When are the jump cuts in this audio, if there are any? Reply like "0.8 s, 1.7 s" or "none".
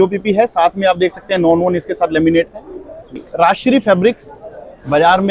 3.2 s